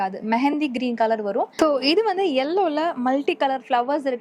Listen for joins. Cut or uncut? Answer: cut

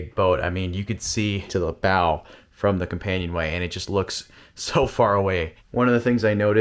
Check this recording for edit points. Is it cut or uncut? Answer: cut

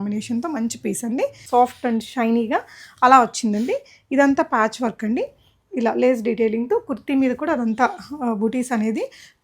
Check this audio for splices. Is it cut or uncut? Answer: cut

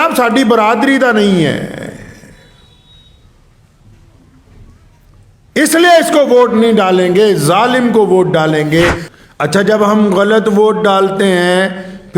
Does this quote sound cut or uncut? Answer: cut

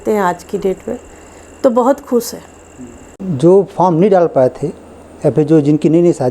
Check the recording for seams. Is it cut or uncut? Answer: cut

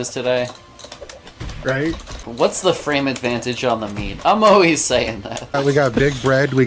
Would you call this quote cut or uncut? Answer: cut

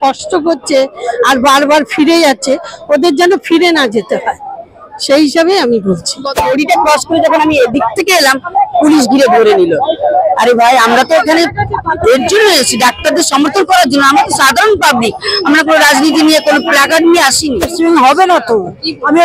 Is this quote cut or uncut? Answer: cut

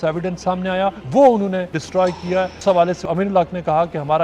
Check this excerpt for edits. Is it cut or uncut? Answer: cut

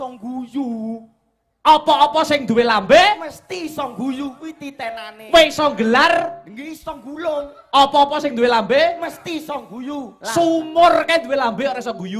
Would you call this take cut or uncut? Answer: uncut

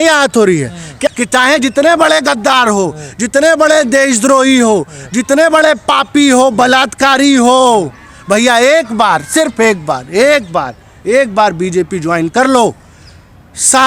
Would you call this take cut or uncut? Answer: cut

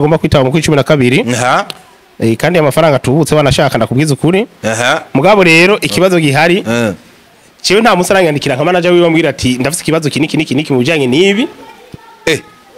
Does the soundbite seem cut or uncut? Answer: uncut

